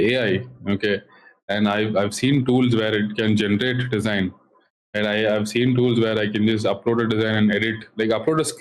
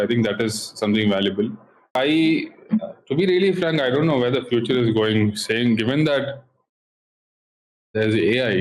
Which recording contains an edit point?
second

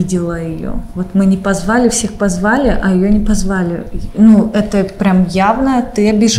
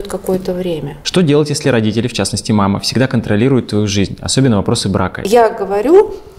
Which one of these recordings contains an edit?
second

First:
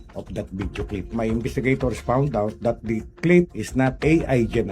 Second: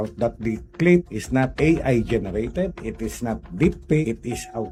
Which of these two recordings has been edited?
first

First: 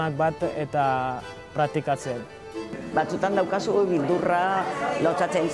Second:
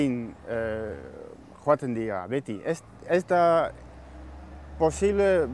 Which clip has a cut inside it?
first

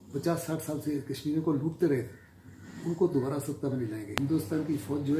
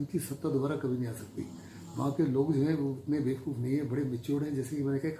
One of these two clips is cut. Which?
first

